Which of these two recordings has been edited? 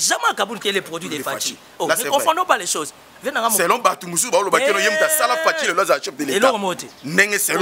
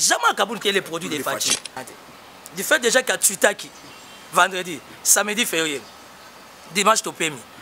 second; 1 cut; at 1.7 s

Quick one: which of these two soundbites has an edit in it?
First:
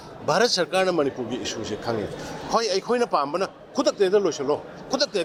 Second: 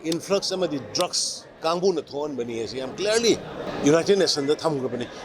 second; 2 cuts; at 1.5 s, 3.7 s

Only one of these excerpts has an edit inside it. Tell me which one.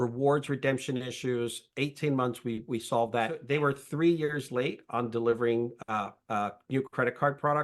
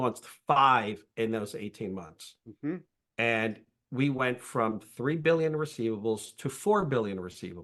first; 1 cut; at 3.4 s

